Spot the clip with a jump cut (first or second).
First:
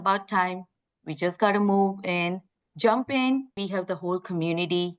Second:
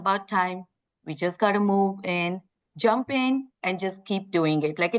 first